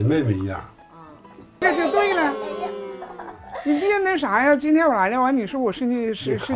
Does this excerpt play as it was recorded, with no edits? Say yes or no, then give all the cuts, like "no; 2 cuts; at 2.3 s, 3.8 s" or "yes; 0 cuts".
no; 1 cut; at 1.6 s